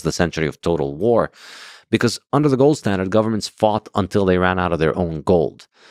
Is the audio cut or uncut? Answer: uncut